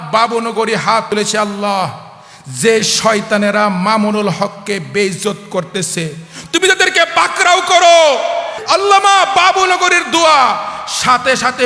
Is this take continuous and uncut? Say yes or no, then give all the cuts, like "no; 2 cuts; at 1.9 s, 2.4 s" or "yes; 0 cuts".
no; 2 cuts; at 1.1 s, 8.6 s